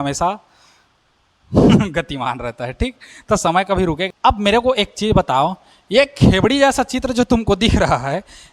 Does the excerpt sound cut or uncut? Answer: cut